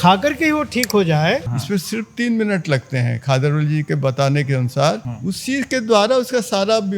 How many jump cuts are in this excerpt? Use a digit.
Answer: 2